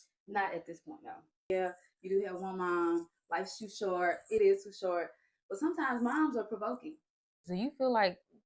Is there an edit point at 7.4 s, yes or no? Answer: yes